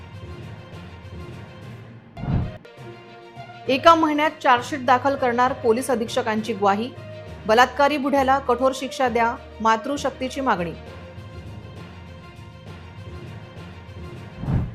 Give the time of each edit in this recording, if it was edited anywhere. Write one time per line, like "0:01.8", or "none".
none

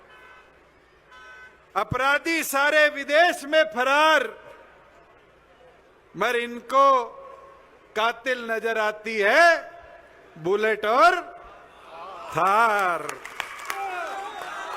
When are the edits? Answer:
0:13.7

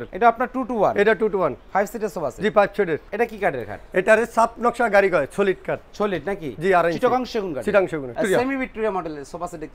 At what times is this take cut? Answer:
0:03.1
0:08.1

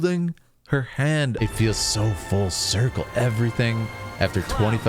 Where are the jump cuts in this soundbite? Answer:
0:01.4

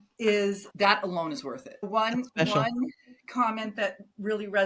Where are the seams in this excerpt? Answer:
0:01.7

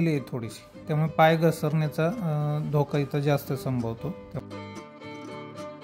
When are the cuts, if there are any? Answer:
0:04.3

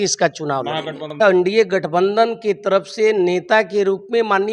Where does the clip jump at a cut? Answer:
0:01.2

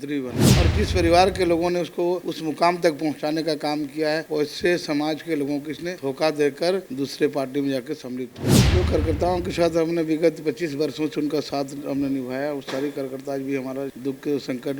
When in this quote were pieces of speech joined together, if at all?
0:02.3
0:04.2
0:05.9
0:06.9
0:08.6

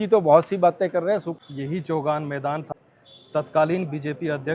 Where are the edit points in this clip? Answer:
0:01.3
0:02.7

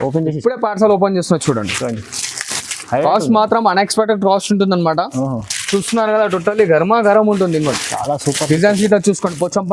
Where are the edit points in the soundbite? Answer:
none

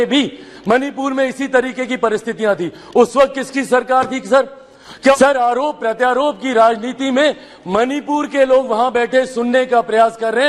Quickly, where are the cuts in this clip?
0:05.1

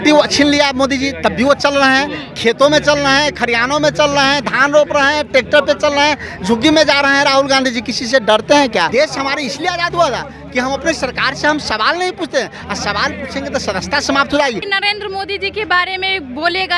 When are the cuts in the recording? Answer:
0:08.9
0:14.7

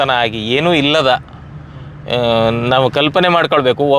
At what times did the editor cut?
none

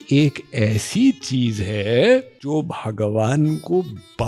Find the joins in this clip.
0:02.4

